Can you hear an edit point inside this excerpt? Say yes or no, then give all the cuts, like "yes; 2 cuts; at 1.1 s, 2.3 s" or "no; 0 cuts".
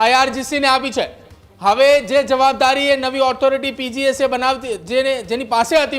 no; 0 cuts